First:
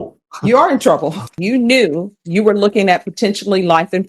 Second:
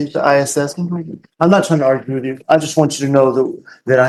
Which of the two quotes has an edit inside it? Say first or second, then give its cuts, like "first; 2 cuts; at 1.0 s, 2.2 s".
first; 1 cut; at 1.4 s